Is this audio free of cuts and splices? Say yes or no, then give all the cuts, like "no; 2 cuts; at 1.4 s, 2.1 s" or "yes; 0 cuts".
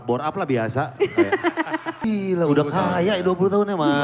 no; 1 cut; at 2.0 s